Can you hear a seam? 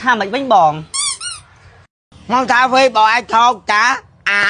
no; 0 cuts

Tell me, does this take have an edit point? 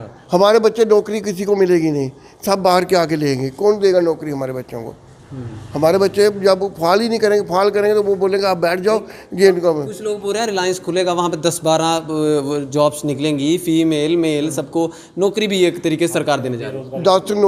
no; 0 cuts

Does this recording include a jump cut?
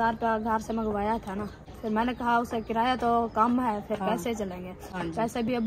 yes; 1 cut; at 1.6 s

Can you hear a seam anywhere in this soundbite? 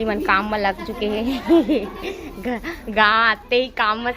yes; 1 cut; at 1.4 s

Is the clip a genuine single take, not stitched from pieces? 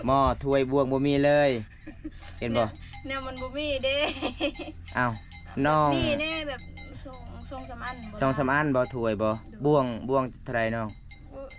yes; 0 cuts

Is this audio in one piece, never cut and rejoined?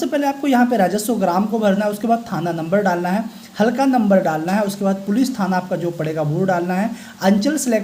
yes; 0 cuts

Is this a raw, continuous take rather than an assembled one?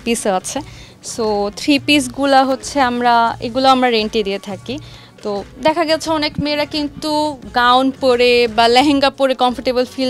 yes; 0 cuts

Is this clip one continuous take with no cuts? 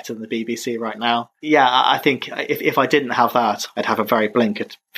yes; 0 cuts

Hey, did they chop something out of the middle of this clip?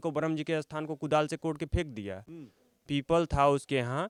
no; 0 cuts

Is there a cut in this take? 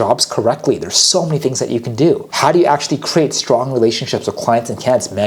no; 0 cuts

